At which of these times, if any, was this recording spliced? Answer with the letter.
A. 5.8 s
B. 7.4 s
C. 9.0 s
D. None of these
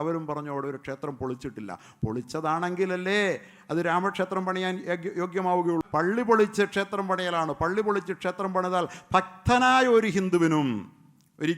A